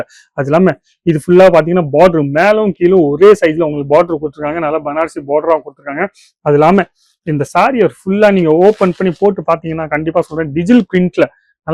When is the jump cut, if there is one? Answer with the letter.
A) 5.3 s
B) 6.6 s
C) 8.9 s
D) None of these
D